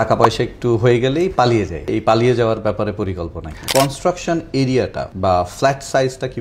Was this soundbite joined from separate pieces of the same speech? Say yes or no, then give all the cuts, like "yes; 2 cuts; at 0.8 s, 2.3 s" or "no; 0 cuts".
yes; 3 cuts; at 1.9 s, 3.6 s, 5.0 s